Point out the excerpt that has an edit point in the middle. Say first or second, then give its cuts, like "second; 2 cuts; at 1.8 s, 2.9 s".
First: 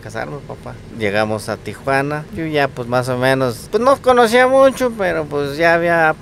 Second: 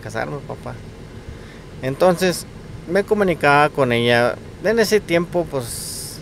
first; 3 cuts; at 0.9 s, 2.3 s, 3.6 s